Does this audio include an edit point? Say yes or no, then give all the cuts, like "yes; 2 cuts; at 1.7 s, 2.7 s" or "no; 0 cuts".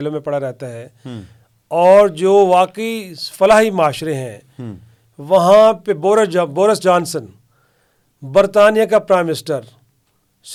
no; 0 cuts